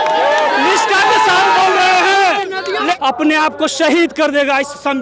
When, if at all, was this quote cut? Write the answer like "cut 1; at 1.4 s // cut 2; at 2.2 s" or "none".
cut 1; at 3.0 s